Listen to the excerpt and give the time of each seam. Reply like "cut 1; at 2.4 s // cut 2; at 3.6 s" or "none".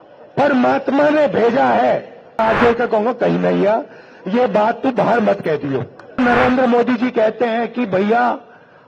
cut 1; at 2.4 s // cut 2; at 6.2 s

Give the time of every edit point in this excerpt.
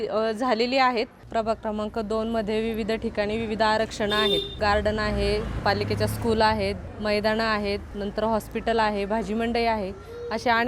cut 1; at 1.2 s // cut 2; at 4.6 s // cut 3; at 5.6 s // cut 4; at 6.9 s // cut 5; at 7.9 s

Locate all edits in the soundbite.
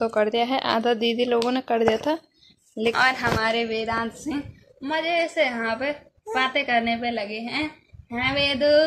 cut 1; at 2.9 s

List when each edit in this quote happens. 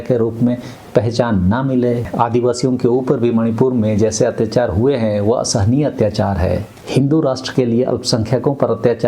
cut 1; at 2.1 s // cut 2; at 6.7 s

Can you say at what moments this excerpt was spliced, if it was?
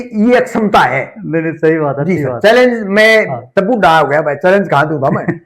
none

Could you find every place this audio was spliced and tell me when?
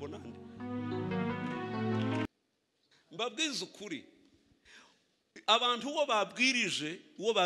cut 1; at 2.3 s

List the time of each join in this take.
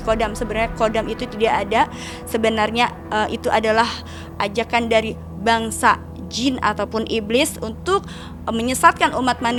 none

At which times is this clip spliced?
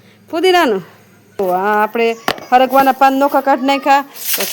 cut 1; at 1.4 s

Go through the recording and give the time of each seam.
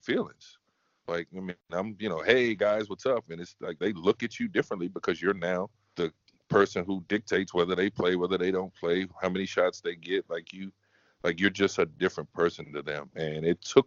none

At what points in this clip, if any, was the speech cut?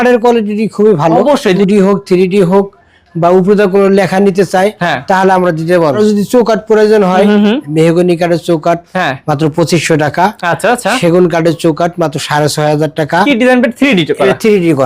cut 1; at 1.2 s // cut 2; at 6.0 s // cut 3; at 13.3 s

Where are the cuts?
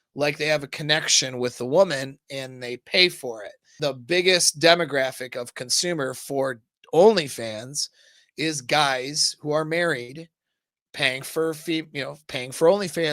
cut 1; at 3.7 s

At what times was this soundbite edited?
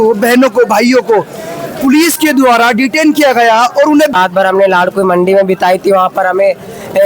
cut 1; at 4.1 s

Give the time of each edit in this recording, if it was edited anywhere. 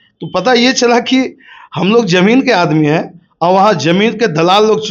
none

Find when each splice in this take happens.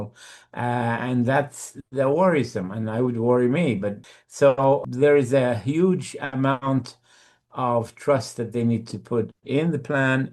cut 1; at 4.1 s // cut 2; at 4.9 s

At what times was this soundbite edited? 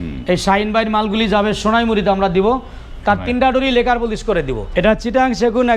cut 1; at 4.6 s

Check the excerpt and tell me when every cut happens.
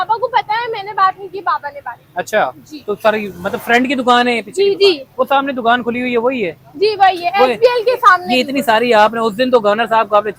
none

